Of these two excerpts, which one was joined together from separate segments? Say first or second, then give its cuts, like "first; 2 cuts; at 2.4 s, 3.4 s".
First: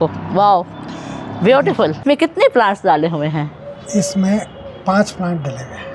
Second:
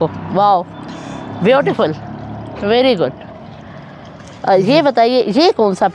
first; 1 cut; at 2.0 s